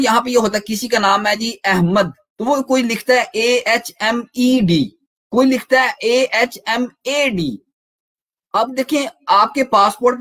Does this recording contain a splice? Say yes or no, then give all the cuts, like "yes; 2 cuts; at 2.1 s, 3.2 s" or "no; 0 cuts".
yes; 1 cut; at 2.2 s